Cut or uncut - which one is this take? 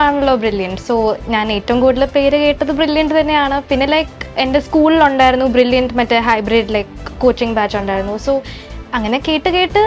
uncut